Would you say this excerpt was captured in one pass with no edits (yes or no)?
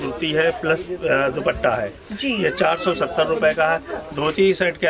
yes